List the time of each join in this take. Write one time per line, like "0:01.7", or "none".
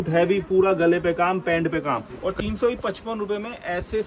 0:02.2